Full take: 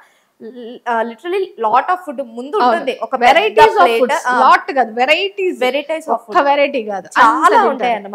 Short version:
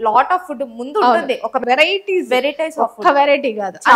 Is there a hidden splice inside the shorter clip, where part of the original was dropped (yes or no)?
yes